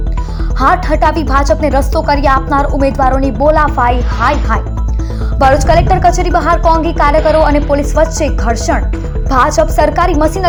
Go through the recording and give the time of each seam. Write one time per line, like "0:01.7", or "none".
none